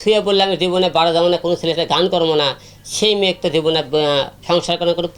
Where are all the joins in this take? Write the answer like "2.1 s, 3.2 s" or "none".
none